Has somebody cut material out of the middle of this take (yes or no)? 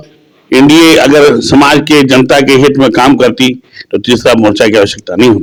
no